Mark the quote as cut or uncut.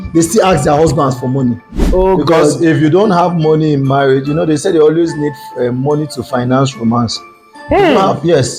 cut